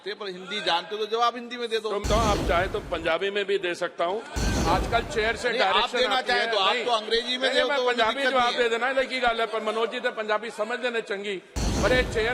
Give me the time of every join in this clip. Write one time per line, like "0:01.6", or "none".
0:02.0
0:04.3